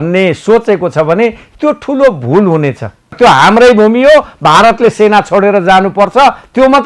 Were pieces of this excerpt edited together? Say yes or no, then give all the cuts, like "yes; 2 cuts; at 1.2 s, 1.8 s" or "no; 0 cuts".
yes; 1 cut; at 3.1 s